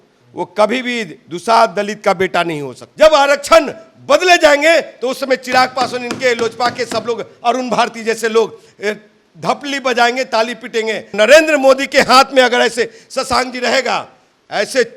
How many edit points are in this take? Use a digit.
2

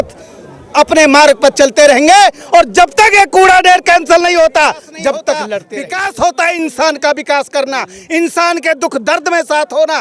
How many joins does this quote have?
1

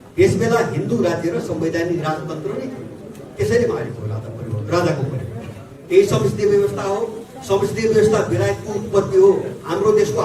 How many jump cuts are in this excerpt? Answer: 1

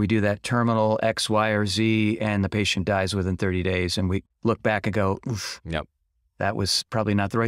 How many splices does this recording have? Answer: 1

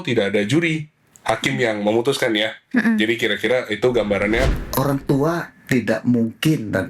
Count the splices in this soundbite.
1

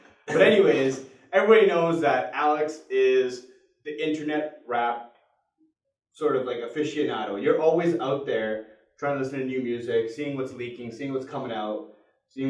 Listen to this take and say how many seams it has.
0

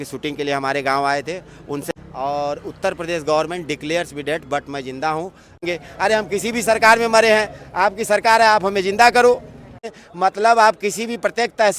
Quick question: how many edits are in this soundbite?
3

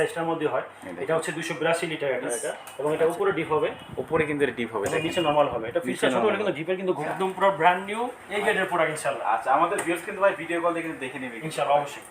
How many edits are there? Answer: 2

